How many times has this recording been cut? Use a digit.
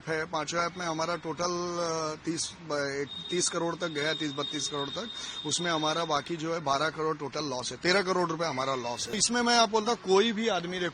1